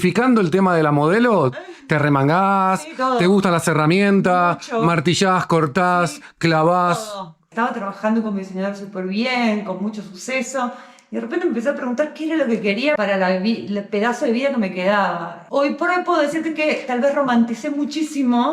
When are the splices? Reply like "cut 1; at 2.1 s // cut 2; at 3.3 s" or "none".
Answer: cut 1; at 7.5 s // cut 2; at 15.3 s

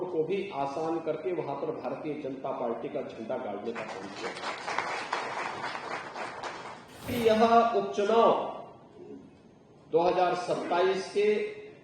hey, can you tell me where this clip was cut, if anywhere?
cut 1; at 7.1 s

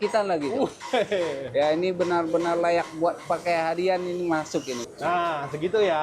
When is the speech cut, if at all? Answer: cut 1; at 4.8 s

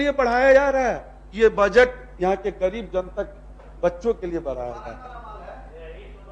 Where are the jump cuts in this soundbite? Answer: none

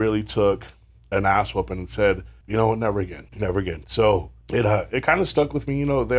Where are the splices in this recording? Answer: cut 1; at 2.3 s // cut 2; at 3.2 s // cut 3; at 4.4 s

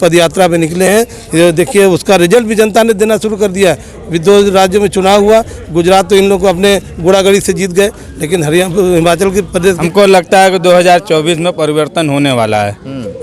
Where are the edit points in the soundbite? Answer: cut 1; at 9.8 s

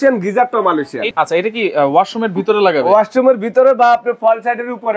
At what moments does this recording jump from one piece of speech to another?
cut 1; at 1.1 s

